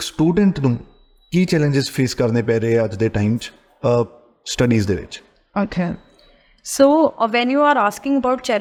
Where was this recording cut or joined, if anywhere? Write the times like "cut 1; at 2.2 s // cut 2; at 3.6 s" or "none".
none